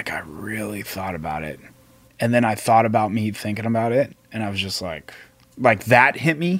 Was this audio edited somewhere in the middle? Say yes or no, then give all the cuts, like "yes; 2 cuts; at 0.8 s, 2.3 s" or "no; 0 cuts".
no; 0 cuts